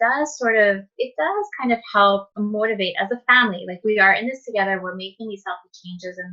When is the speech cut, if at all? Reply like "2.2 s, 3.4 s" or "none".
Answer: 2.3 s